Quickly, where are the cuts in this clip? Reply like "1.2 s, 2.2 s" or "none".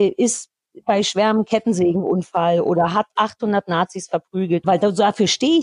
4.6 s